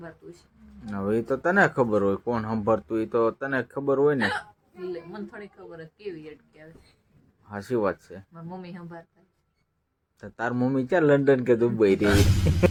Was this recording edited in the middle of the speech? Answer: no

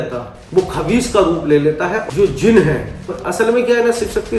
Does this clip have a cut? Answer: yes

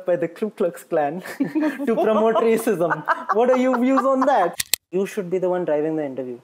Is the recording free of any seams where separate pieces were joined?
no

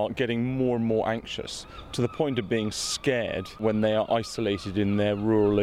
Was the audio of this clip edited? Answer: yes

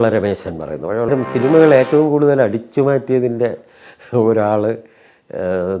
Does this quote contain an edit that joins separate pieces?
yes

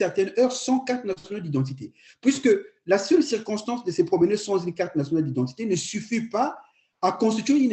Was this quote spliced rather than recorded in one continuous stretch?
no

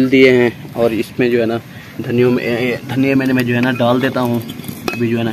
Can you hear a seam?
no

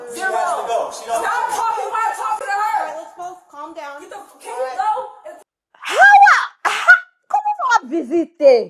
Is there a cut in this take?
yes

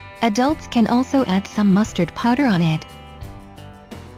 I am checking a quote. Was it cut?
no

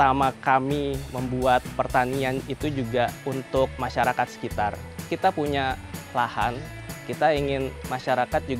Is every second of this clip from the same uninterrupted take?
no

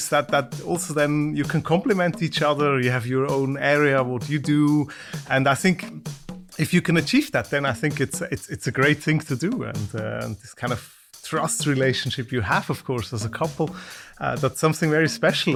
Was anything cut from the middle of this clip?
no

